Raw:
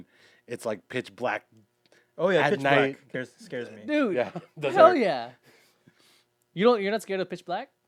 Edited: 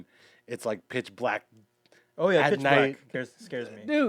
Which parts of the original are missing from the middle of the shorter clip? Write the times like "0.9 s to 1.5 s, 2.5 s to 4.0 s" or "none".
none